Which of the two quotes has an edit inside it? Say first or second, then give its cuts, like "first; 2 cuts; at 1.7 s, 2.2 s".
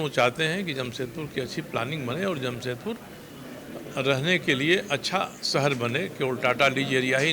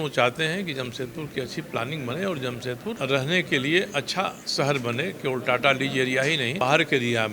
second; 2 cuts; at 3.0 s, 6.6 s